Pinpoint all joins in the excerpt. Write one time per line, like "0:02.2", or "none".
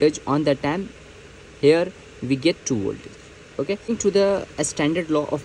0:03.9